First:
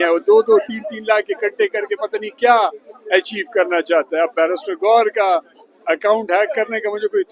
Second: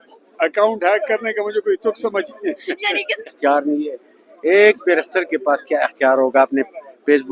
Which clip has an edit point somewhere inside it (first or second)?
second